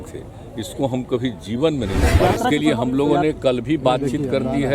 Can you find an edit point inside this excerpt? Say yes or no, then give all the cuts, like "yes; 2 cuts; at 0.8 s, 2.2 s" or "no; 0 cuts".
yes; 1 cut; at 2.2 s